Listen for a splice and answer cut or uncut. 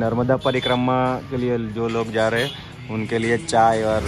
uncut